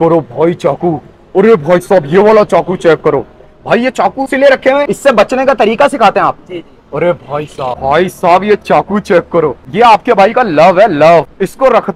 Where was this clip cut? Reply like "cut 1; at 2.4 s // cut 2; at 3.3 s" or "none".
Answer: none